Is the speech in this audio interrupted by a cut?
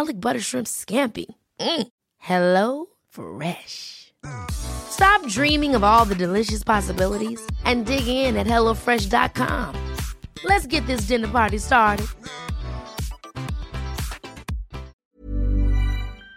yes; 1 cut; at 14.9 s

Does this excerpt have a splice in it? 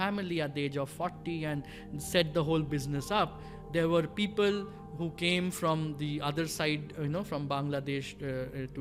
no; 0 cuts

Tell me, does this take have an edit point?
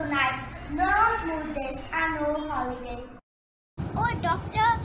yes; 1 cut; at 3.7 s

